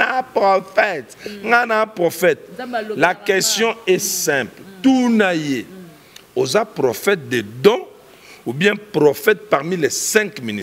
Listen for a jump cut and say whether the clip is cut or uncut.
uncut